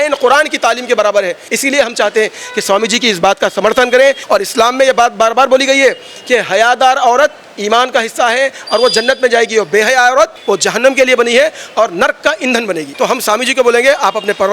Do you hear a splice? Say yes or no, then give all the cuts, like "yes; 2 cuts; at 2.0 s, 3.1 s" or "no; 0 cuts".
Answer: yes; 4 cuts; at 1.4 s, 4.2 s, 10.4 s, 12.9 s